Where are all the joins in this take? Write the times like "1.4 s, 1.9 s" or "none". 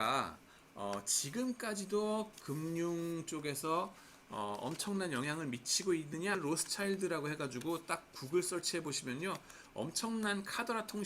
6.4 s